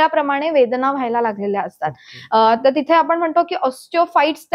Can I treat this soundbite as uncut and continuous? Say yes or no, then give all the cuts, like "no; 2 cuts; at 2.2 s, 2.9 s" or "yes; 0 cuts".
yes; 0 cuts